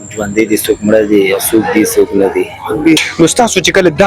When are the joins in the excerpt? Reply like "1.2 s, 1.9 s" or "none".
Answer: 3.0 s

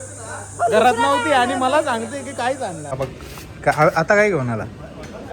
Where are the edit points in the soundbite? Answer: 2.9 s

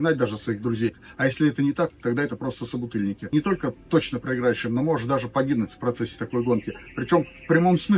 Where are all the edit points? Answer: 1.0 s, 3.3 s

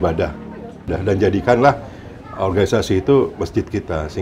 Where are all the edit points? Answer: 0.9 s

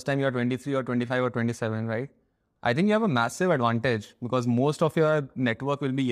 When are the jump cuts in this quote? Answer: 2.5 s

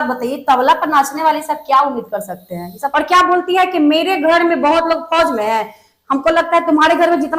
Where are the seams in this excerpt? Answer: 2.8 s

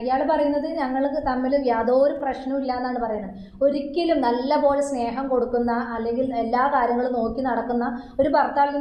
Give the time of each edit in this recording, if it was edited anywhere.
none

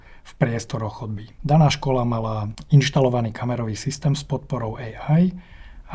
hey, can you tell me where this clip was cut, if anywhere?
1.3 s, 2.5 s

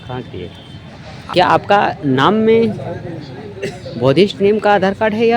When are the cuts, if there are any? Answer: 1.1 s

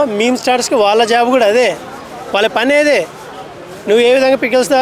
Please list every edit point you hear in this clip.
none

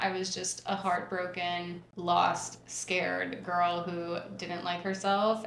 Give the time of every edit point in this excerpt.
1.8 s

